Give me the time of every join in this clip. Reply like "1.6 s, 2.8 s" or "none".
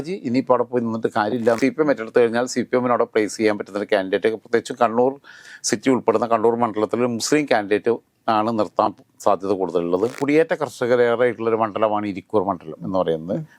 1.6 s, 10.2 s